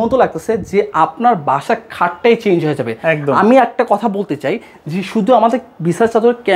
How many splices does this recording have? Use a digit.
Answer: 0